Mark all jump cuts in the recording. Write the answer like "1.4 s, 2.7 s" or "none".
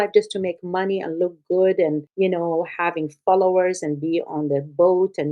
2.1 s